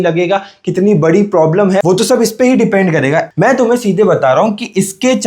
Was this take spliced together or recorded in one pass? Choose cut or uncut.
cut